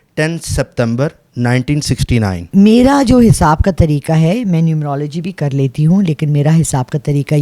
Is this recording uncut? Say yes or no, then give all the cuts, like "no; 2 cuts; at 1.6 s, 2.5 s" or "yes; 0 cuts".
no; 1 cut; at 2.4 s